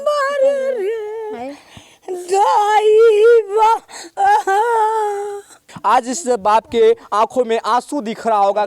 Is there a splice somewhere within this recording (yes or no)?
yes